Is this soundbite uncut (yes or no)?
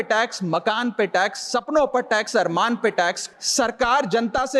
no